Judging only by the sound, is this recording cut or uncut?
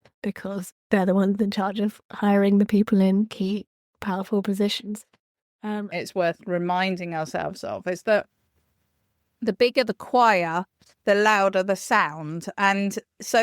cut